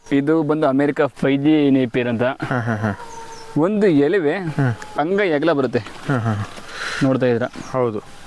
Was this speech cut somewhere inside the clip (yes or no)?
no